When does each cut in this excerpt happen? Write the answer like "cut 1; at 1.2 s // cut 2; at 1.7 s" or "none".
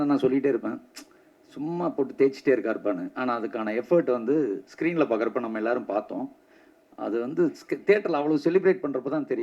none